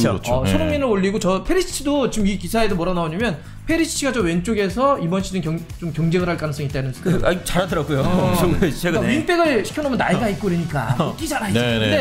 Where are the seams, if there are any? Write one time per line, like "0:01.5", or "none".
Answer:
none